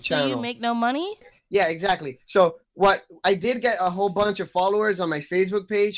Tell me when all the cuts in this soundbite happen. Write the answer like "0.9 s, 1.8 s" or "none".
1.3 s